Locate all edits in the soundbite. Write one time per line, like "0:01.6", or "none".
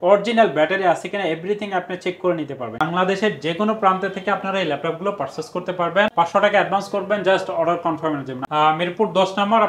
0:02.8
0:08.4